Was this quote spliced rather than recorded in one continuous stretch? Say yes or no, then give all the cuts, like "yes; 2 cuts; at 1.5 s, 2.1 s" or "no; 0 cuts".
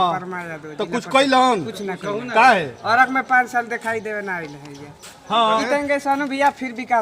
yes; 1 cut; at 5.6 s